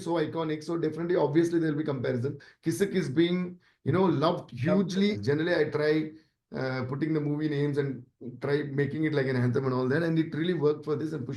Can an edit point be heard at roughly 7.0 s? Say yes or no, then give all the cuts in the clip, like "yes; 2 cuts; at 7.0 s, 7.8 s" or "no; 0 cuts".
no; 2 cuts; at 2.5 s, 5.2 s